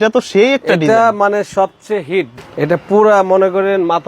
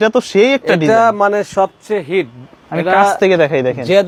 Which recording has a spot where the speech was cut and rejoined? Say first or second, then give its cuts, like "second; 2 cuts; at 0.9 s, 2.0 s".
first; 1 cut; at 2.4 s